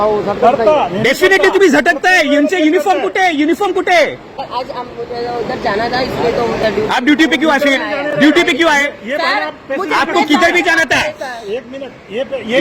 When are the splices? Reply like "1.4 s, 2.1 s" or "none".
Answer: 4.3 s